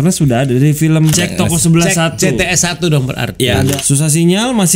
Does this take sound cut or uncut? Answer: cut